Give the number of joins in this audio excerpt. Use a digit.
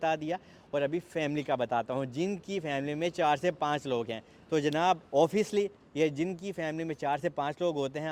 0